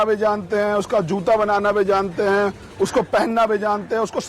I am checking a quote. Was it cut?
no; 0 cuts

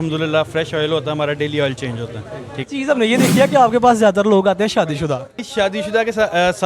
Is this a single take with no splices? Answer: no; 2 cuts; at 2.6 s, 5.3 s

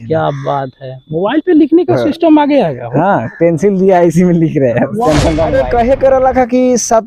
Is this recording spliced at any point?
yes; 1 cut; at 5.6 s

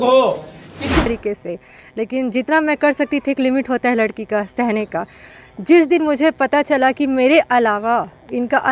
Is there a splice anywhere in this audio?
yes; 1 cut; at 1.1 s

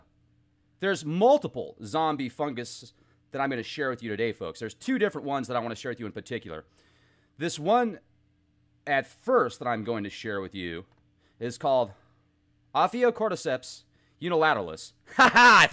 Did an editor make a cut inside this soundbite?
yes; 1 cut; at 7.5 s

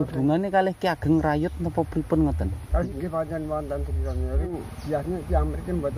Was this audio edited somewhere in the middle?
yes; 2 cuts; at 2.9 s, 4.5 s

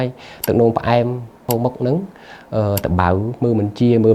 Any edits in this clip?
yes; 1 cut; at 1.4 s

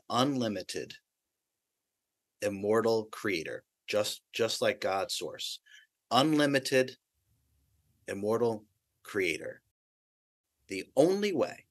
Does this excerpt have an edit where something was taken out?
yes; 1 cut; at 10.1 s

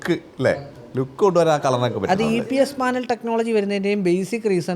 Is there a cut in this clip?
yes; 1 cut; at 1.6 s

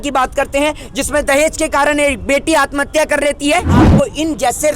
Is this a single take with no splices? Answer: no; 1 cut; at 3.9 s

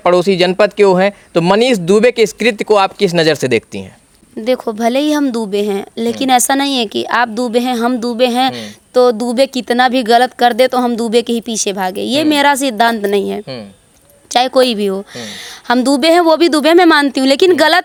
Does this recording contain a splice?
no; 0 cuts

